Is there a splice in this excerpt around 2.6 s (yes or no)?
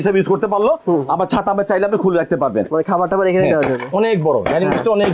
yes